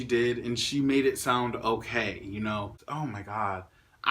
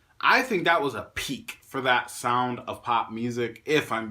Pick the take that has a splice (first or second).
first